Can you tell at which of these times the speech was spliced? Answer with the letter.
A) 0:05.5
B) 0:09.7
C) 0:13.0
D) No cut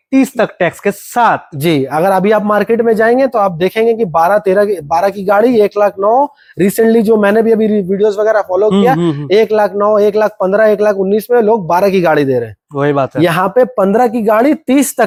D